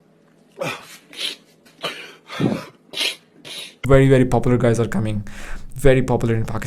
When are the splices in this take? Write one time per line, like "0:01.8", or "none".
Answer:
0:03.7